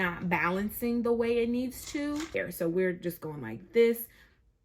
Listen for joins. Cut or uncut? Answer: cut